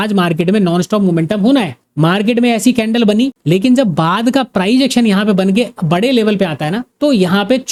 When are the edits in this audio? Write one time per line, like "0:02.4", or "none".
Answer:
none